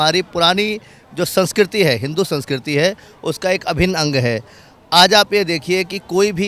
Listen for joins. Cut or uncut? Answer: uncut